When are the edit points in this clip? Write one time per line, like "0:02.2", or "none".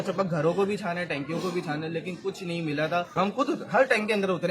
0:03.3